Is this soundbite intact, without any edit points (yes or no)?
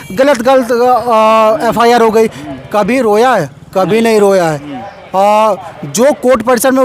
yes